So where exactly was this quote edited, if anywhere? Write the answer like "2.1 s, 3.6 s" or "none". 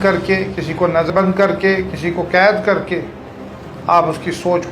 1.1 s